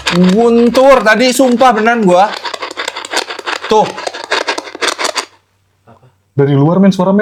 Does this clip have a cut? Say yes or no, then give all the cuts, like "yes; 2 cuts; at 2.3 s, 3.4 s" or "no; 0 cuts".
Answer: no; 0 cuts